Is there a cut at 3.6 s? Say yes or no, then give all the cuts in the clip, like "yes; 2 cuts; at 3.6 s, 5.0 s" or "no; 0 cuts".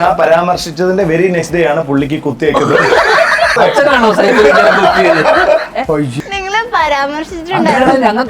yes; 2 cuts; at 3.6 s, 6.1 s